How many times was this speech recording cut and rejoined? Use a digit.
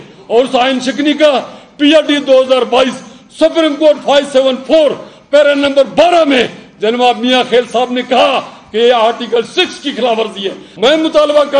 1